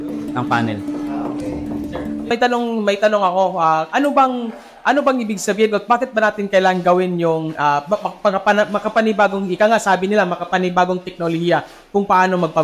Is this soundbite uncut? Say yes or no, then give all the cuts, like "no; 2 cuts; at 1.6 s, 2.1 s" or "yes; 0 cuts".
no; 1 cut; at 2.3 s